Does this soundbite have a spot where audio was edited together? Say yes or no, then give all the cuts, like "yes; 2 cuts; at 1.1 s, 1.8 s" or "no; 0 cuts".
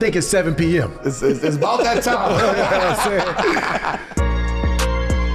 yes; 1 cut; at 4.1 s